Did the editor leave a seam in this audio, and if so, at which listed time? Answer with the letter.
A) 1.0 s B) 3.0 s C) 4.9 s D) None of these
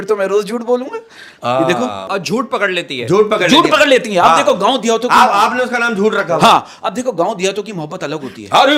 D